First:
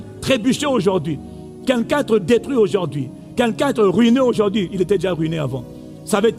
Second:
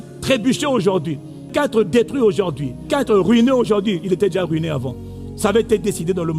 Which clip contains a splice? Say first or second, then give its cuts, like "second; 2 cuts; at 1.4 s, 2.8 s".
second; 2 cuts; at 1.5 s, 2.9 s